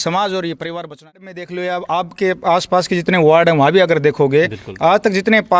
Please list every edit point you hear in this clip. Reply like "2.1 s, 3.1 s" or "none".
1.3 s